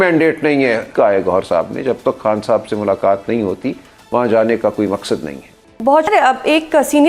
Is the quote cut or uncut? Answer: cut